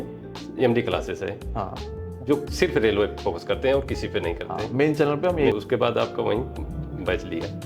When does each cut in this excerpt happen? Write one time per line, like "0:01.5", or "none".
0:05.5

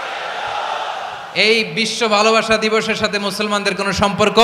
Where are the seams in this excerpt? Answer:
none

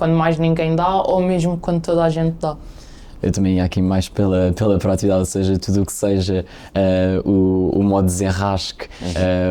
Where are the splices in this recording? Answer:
none

